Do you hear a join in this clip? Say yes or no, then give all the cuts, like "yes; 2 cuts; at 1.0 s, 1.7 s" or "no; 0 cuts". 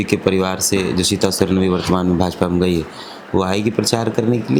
no; 0 cuts